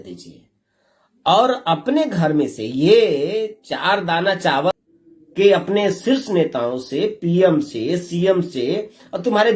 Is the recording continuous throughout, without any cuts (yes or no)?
no